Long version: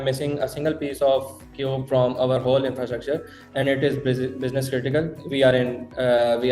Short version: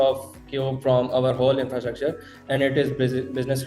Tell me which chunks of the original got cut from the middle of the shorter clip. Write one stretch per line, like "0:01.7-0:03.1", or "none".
none